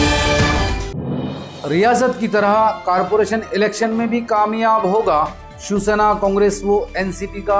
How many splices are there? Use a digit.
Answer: 1